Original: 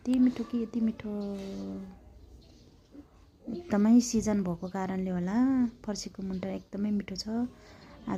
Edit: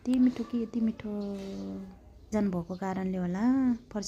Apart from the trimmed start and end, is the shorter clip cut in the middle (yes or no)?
yes